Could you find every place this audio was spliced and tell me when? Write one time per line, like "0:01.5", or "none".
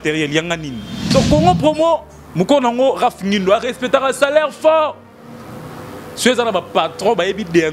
0:00.9